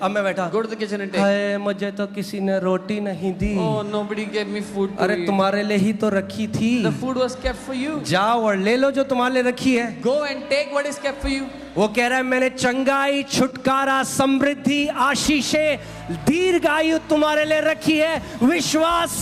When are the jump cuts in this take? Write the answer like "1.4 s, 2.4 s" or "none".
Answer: none